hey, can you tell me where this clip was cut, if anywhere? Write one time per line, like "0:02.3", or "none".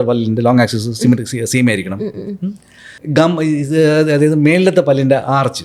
none